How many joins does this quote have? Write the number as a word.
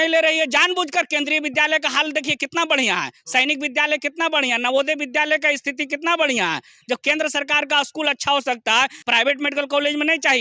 one